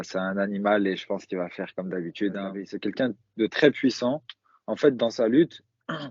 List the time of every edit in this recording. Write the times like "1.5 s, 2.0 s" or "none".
2.5 s